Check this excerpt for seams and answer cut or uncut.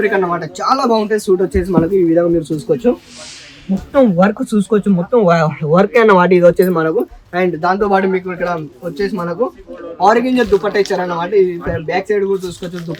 uncut